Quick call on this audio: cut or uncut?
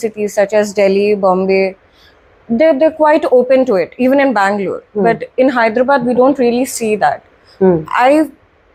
uncut